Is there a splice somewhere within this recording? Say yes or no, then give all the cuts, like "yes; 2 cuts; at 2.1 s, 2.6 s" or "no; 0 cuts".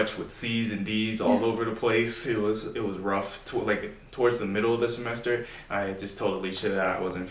no; 0 cuts